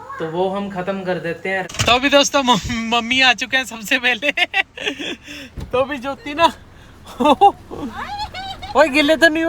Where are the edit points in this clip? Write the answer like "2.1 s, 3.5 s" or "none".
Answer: 1.7 s